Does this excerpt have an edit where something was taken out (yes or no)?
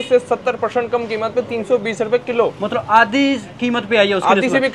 no